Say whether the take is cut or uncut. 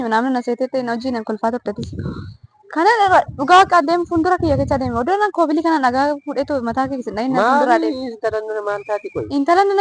uncut